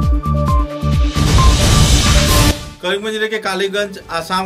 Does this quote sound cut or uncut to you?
cut